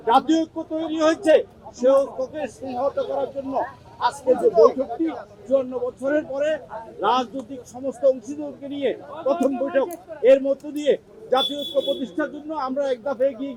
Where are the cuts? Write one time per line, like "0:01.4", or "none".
none